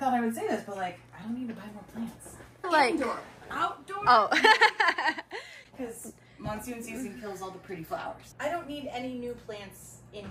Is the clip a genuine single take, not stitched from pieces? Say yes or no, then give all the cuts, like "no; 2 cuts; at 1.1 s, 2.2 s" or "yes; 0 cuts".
yes; 0 cuts